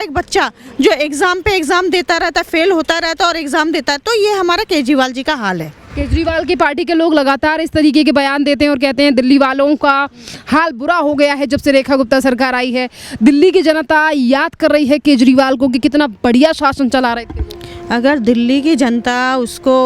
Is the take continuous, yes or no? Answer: yes